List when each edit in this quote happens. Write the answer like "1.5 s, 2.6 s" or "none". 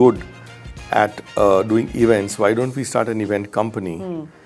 none